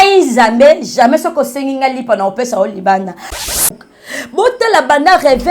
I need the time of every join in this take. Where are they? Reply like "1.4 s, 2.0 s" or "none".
3.5 s

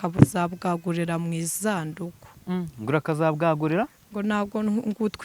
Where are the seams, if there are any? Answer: none

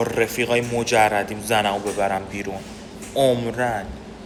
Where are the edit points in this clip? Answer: none

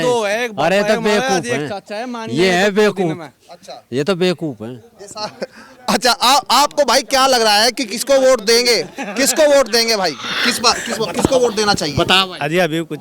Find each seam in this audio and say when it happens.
none

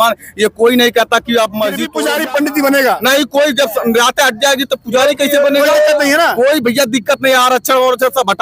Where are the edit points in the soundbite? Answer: 1.9 s

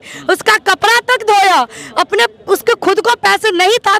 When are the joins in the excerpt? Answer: none

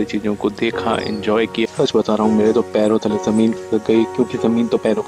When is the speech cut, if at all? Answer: 1.6 s

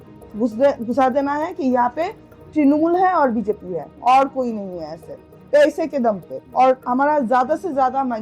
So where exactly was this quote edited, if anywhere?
6.4 s

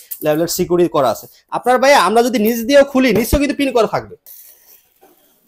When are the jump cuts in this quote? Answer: 4.2 s

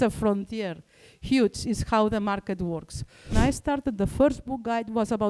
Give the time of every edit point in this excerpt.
3.3 s

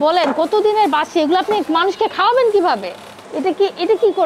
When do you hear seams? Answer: 3.1 s

